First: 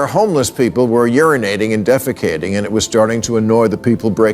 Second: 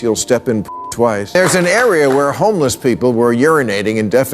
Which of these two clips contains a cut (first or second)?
second